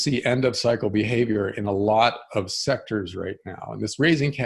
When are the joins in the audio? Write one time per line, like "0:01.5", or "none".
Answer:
none